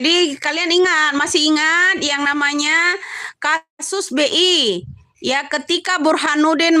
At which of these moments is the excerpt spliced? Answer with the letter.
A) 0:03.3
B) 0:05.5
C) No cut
C